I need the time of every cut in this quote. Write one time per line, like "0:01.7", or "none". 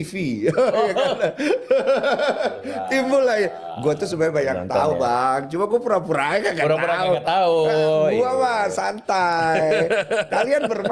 none

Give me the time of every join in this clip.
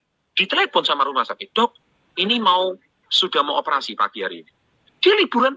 none

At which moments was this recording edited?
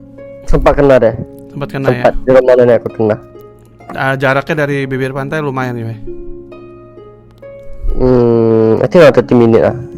none

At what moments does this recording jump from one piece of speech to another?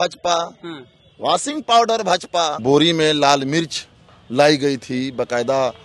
0:02.6

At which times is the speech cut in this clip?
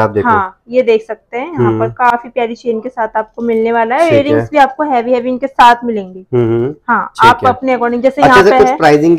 none

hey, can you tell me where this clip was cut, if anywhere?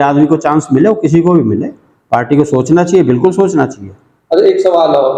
none

